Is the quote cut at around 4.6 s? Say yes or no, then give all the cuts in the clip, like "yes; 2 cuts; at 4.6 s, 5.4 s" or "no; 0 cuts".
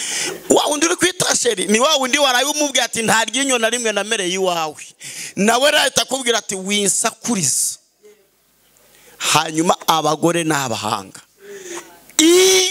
no; 0 cuts